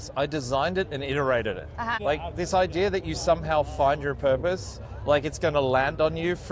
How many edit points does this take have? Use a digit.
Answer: 1